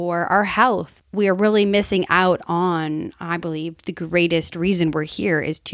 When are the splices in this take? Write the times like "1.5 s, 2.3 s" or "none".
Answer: 1.0 s